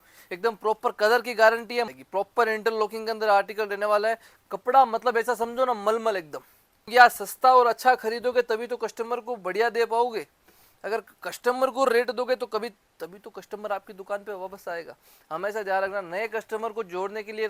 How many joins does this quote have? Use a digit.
2